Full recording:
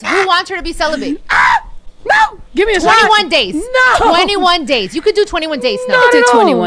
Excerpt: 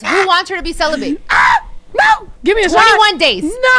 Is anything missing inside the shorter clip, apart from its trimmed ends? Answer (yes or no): yes